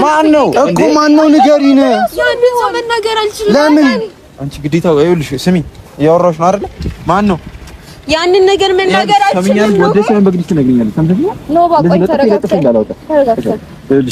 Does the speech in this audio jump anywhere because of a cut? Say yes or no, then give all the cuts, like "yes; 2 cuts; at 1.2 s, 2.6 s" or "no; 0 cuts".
no; 0 cuts